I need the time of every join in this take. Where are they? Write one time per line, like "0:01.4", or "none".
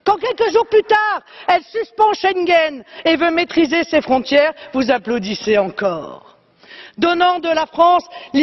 0:01.0